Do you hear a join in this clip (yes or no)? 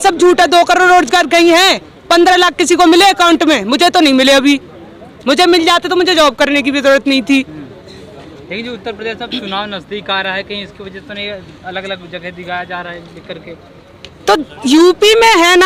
no